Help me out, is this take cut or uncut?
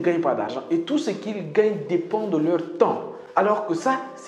cut